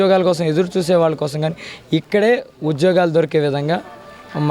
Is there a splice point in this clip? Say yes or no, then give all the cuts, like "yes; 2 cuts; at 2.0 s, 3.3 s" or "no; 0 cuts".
no; 0 cuts